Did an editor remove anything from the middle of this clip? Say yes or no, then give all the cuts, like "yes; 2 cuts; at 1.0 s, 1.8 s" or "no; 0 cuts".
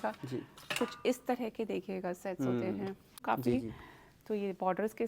yes; 1 cut; at 3.2 s